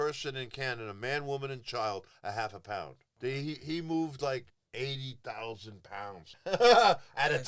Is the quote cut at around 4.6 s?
yes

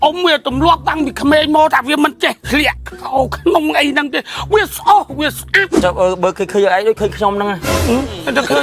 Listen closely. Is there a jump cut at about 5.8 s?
yes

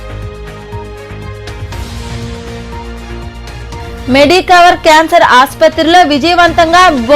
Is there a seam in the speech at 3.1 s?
no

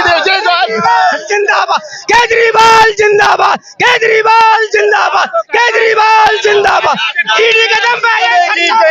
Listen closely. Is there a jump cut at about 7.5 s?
no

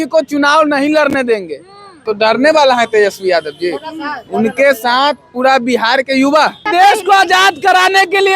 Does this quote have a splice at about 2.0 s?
yes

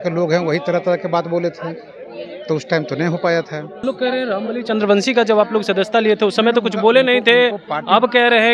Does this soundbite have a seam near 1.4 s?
no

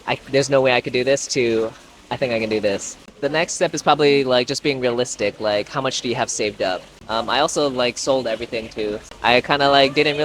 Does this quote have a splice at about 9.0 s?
yes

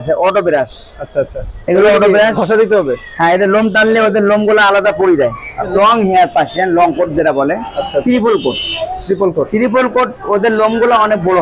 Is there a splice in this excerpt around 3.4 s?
no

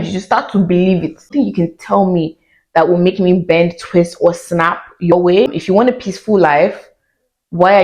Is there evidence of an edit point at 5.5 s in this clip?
yes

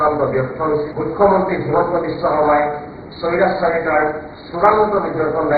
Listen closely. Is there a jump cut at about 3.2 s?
no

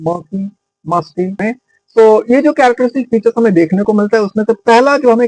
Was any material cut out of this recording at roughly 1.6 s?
yes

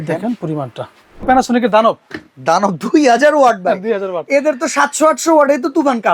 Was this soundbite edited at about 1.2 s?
yes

